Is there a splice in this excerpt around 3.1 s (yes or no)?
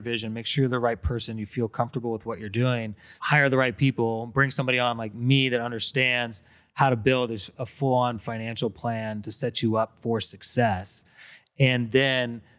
yes